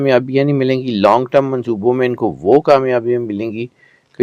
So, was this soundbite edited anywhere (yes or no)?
no